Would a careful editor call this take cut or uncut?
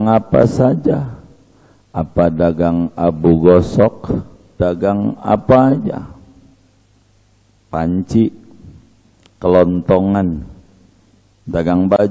cut